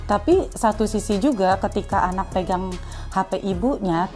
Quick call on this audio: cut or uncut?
cut